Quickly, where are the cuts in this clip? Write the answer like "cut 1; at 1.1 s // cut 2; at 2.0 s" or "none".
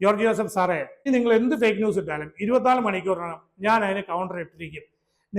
cut 1; at 1.1 s